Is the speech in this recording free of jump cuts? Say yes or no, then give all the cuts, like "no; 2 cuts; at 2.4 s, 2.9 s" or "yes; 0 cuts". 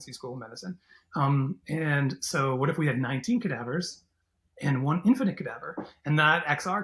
yes; 0 cuts